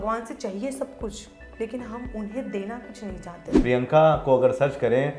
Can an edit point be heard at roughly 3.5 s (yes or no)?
yes